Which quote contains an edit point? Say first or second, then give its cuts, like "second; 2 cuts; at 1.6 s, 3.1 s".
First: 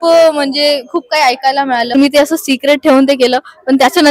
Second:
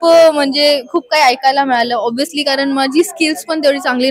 first; 1 cut; at 1.9 s